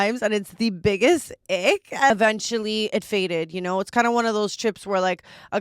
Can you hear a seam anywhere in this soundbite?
yes; 1 cut; at 2.1 s

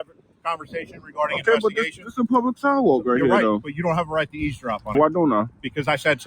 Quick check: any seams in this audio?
yes; 1 cut; at 4.9 s

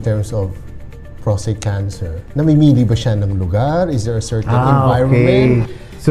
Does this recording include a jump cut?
yes; 1 cut; at 2.2 s

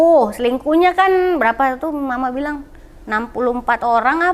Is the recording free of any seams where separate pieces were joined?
yes; 0 cuts

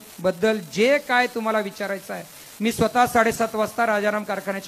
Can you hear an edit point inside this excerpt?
no; 0 cuts

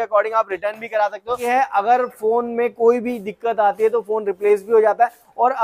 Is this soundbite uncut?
no; 1 cut; at 1.4 s

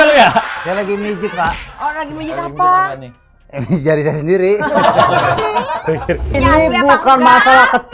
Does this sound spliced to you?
yes; 1 cut; at 6.4 s

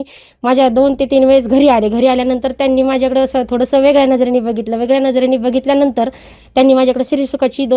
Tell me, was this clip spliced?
no; 0 cuts

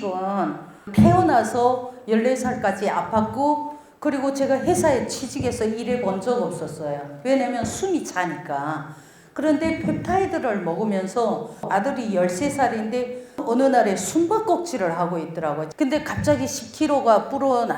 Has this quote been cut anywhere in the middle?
yes; 4 cuts; at 0.9 s, 11.7 s, 13.4 s, 15.6 s

